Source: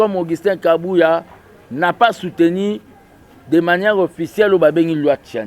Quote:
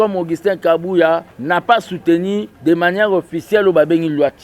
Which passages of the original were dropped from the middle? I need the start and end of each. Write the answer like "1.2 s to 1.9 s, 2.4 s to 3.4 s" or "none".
1.3 s to 1.7 s, 2.8 s to 3.4 s